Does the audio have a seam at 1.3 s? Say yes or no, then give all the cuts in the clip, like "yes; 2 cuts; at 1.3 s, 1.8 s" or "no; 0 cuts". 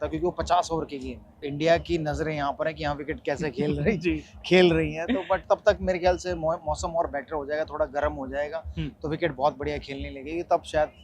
yes; 1 cut; at 1.3 s